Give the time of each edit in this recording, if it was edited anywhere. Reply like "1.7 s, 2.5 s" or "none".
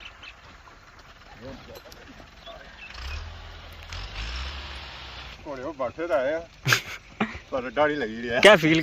1.0 s, 5.3 s